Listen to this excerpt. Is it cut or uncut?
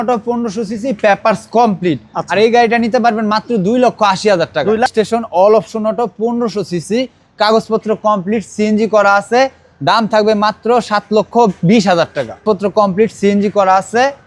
cut